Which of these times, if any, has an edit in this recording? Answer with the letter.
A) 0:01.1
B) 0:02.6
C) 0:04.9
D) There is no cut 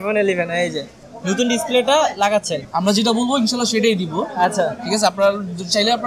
B